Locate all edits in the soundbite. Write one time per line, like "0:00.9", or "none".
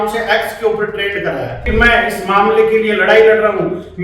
0:01.7